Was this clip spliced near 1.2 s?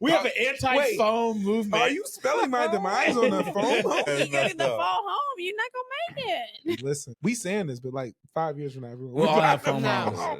no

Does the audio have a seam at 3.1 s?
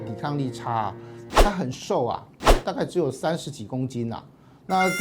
no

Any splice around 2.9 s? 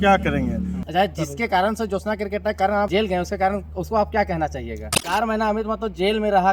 yes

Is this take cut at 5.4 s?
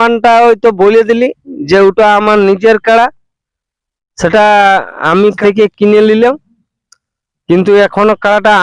yes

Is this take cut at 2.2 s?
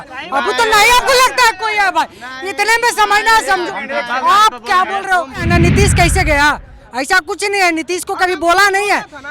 no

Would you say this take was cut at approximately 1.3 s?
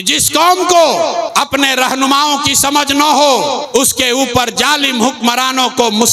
yes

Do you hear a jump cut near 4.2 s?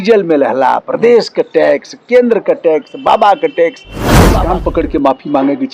yes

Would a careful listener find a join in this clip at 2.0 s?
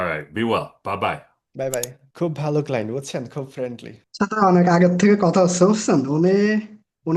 yes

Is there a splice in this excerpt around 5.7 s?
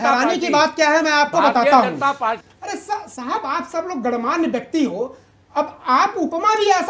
no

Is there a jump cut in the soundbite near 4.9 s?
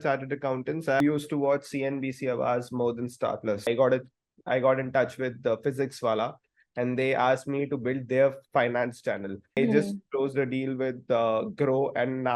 no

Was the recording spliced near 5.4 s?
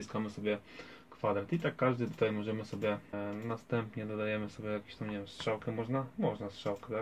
no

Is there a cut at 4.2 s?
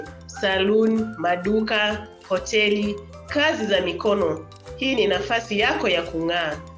no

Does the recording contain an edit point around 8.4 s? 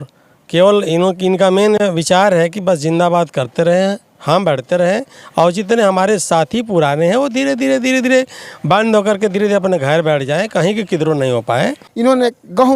no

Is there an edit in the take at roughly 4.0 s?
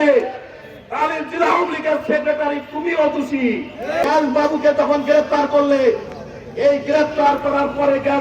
yes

